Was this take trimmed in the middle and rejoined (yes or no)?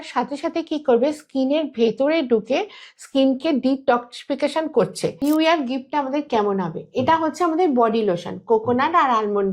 yes